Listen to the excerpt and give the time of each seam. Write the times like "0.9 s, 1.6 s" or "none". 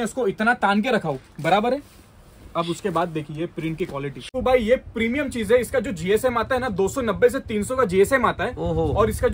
4.3 s